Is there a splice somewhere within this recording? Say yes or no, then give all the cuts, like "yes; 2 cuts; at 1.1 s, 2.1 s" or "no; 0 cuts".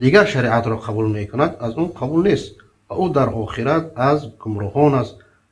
no; 0 cuts